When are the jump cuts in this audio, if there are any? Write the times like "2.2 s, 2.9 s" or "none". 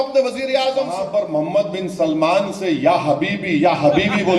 1.0 s